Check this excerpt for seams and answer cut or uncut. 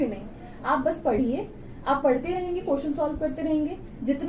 uncut